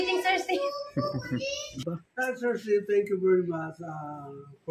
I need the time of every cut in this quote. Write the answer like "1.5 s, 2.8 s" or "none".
1.9 s

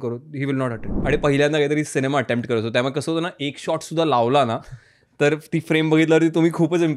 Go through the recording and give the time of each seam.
1.0 s

